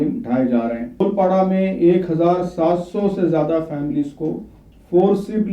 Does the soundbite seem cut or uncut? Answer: cut